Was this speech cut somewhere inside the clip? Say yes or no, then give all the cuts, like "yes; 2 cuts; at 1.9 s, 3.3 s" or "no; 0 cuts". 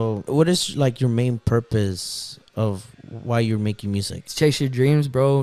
no; 0 cuts